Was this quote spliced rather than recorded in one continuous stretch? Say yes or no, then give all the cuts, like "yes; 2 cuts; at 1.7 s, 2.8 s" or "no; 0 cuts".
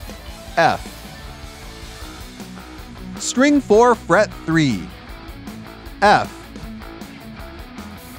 no; 0 cuts